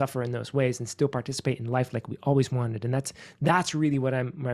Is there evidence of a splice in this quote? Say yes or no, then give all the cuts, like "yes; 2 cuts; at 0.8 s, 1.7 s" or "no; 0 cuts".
no; 0 cuts